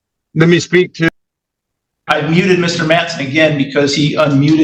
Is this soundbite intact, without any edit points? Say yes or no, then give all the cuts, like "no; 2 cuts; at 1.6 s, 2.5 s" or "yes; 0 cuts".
yes; 0 cuts